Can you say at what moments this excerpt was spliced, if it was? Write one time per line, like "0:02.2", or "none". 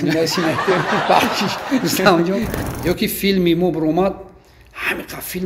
0:02.6